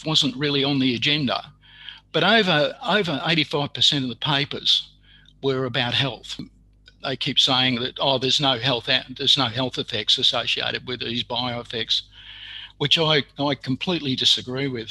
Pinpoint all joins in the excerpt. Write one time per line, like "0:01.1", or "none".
0:06.5